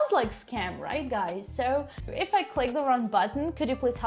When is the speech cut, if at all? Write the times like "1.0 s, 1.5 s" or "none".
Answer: 2.1 s